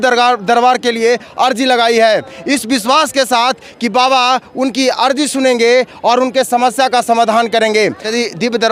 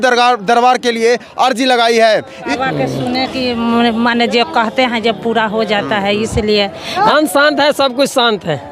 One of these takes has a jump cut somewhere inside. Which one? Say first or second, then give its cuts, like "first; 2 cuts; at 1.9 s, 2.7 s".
second; 2 cuts; at 2.5 s, 7.1 s